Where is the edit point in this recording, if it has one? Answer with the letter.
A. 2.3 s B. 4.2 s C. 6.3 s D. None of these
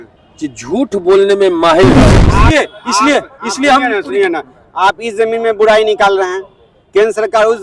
A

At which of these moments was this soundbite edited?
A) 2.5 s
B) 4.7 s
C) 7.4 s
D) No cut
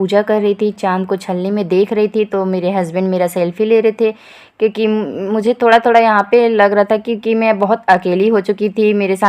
D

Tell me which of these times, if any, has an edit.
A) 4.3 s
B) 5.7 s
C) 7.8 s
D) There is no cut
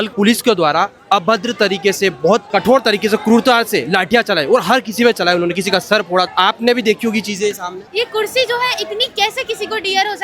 C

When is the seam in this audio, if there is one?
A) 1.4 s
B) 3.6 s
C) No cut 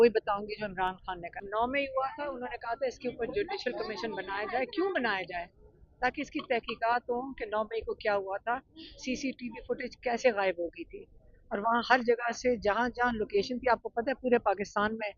A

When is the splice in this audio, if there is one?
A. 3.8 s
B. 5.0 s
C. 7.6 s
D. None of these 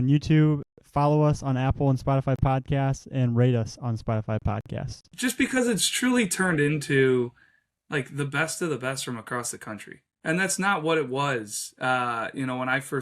B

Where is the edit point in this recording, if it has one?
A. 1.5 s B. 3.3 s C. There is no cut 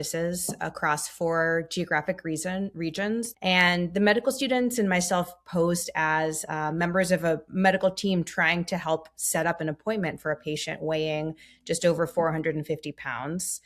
B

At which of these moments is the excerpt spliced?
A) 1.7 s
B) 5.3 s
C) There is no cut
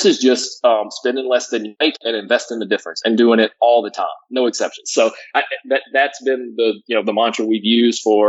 A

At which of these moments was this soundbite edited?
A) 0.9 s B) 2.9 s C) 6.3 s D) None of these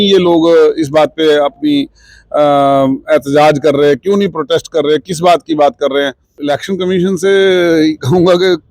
C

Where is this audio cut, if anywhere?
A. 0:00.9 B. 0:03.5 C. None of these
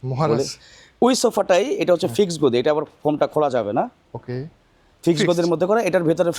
C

